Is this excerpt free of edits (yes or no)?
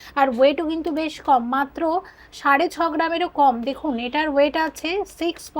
yes